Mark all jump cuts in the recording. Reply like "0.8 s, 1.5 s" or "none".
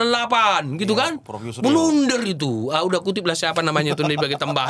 none